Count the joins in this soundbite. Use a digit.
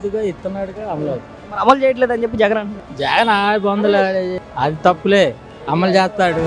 2